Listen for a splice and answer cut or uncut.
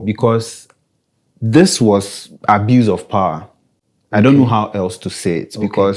uncut